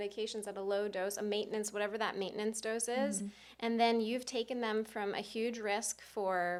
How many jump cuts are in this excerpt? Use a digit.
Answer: 0